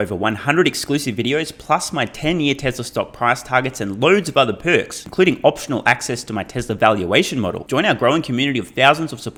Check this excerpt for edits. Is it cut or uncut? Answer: uncut